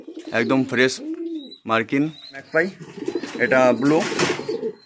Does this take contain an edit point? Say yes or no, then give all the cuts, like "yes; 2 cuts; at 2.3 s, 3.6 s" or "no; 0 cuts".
yes; 1 cut; at 2.5 s